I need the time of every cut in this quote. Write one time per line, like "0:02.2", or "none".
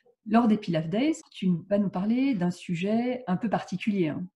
0:01.3